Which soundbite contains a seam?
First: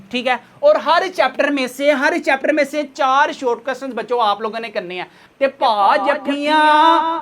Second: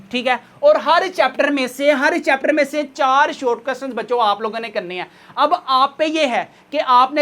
first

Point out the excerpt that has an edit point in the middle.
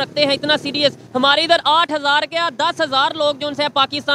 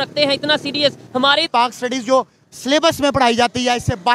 second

